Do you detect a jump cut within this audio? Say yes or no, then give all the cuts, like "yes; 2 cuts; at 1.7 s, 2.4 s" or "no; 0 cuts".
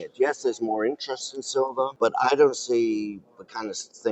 yes; 1 cut; at 1.9 s